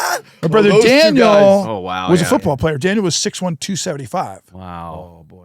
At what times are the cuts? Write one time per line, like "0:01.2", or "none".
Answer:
none